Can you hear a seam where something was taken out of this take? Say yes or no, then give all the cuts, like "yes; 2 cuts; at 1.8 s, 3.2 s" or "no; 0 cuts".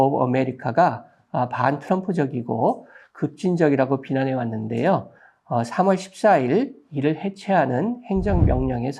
no; 0 cuts